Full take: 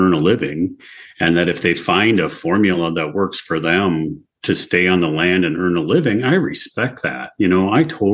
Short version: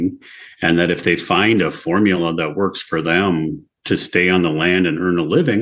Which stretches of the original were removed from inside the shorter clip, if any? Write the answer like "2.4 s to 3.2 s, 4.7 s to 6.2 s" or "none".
none